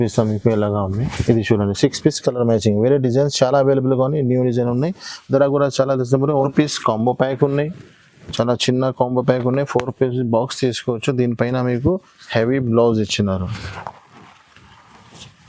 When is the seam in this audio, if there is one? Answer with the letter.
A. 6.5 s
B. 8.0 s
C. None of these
A